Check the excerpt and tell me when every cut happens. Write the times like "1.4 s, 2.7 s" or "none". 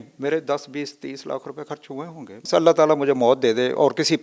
2.4 s